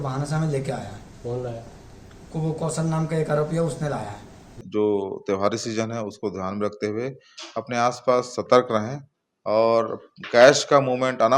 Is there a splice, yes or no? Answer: yes